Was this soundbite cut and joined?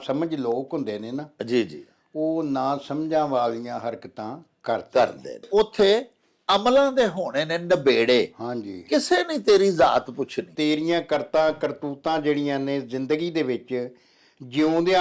yes; 2 cuts; at 5.4 s, 10.5 s

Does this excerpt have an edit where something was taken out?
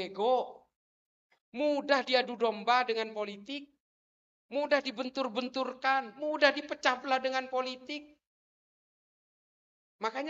no; 0 cuts

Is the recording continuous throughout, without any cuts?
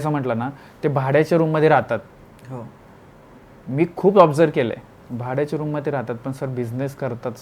yes; 0 cuts

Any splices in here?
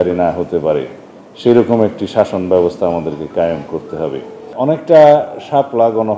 yes; 1 cut; at 4.5 s

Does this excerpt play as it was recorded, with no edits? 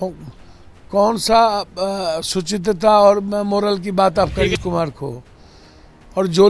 no; 1 cut; at 4.6 s

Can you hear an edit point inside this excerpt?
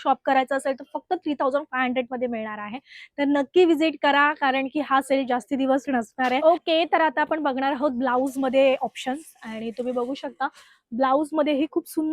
no; 0 cuts

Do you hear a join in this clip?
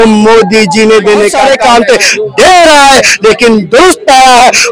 yes; 1 cut; at 1.4 s

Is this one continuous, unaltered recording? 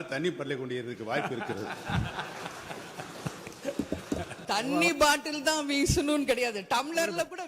no; 1 cut; at 4.4 s

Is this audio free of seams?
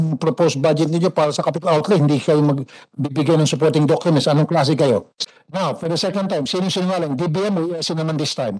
no; 1 cut; at 5.2 s

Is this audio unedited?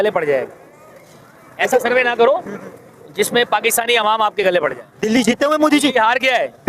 no; 1 cut; at 4.9 s

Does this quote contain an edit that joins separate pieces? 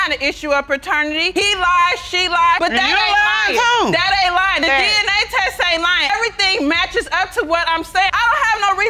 no; 0 cuts

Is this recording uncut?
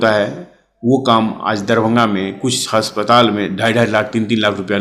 yes; 0 cuts

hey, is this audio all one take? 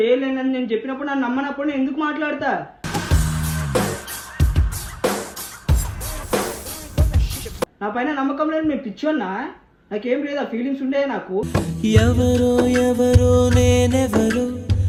yes; 0 cuts

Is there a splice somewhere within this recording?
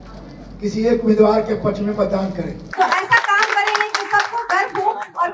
yes; 1 cut; at 2.6 s

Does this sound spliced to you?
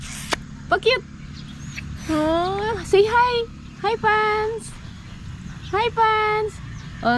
no; 0 cuts

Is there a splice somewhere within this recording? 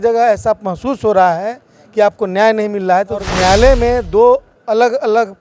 yes; 1 cut; at 3.3 s

